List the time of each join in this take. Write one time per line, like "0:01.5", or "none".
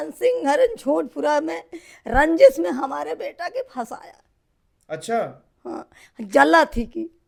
none